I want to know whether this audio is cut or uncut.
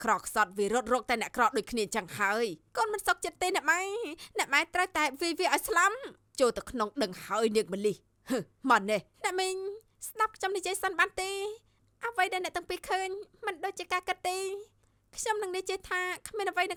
uncut